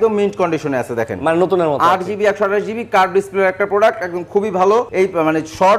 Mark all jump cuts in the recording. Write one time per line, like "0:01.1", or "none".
0:04.9